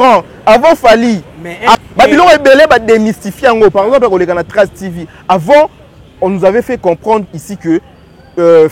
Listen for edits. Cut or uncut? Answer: cut